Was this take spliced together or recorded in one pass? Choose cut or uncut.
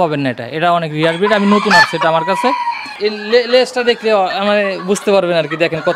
cut